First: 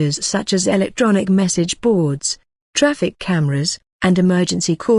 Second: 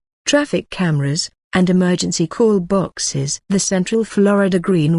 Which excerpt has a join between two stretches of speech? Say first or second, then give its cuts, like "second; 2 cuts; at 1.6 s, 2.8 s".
second; 1 cut; at 3.8 s